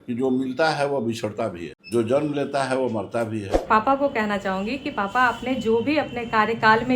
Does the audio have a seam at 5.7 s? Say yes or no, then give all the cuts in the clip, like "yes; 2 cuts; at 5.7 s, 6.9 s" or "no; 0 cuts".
no; 2 cuts; at 1.7 s, 3.5 s